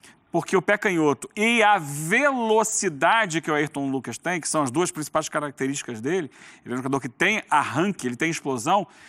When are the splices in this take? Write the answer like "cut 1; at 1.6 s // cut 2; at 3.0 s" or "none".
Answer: none